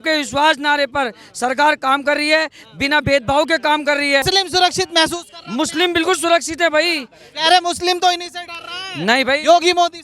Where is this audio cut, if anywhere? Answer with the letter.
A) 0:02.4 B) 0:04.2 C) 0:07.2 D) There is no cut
B